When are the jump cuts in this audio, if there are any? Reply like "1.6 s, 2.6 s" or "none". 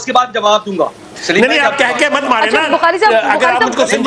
none